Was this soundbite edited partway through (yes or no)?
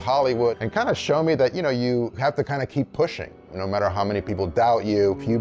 no